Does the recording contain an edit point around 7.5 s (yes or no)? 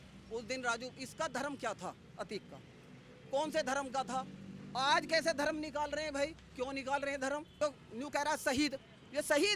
yes